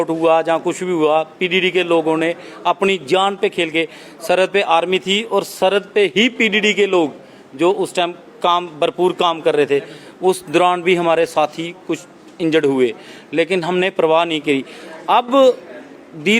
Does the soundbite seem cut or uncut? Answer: uncut